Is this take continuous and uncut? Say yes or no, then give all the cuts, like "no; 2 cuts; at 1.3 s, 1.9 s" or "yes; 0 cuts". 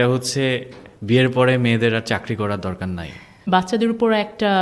no; 1 cut; at 3.3 s